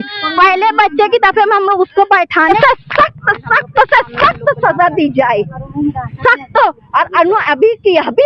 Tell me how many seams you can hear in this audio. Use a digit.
1